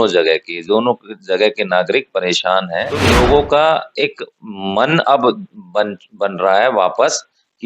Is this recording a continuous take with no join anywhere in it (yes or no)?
no